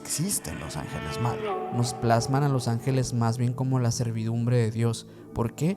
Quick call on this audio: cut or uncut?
cut